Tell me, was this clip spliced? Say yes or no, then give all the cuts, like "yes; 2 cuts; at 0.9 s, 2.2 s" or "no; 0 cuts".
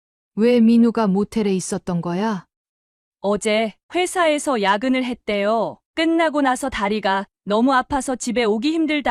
yes; 1 cut; at 2.5 s